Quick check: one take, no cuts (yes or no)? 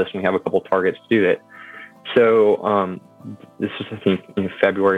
yes